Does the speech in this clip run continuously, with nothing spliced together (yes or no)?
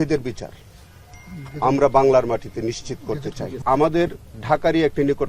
no